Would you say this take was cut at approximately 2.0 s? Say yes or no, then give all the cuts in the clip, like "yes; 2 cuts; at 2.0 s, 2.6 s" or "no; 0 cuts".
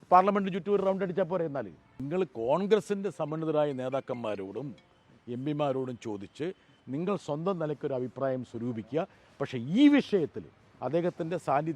yes; 1 cut; at 2.0 s